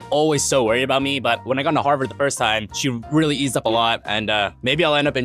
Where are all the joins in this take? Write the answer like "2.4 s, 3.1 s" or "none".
none